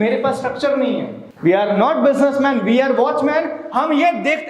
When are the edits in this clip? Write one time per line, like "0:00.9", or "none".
0:01.2

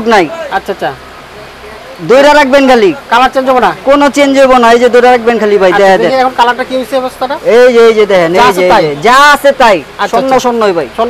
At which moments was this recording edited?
none

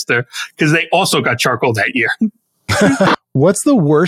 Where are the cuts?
0:03.1

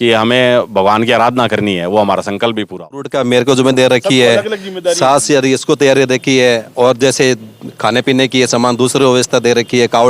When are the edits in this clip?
0:03.1

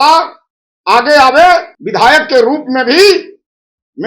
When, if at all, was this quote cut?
0:01.8

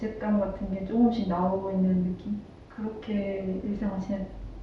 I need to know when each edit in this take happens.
none

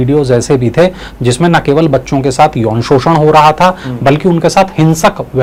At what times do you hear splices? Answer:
none

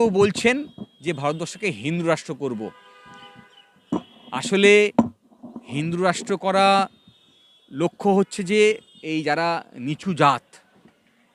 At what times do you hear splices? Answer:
none

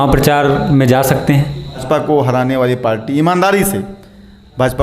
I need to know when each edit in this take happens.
0:01.8

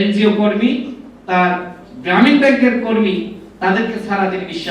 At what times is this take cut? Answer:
0:03.4

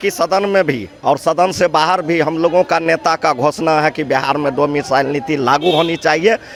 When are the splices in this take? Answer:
none

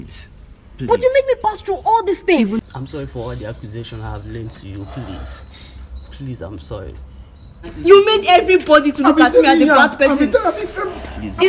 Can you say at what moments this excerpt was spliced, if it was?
0:02.6
0:07.7

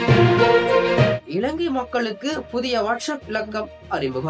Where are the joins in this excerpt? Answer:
none

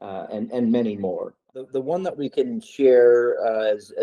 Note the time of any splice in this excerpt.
0:01.6

